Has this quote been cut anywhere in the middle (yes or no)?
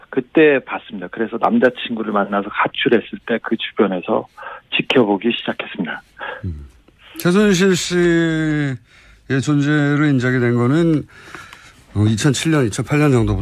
yes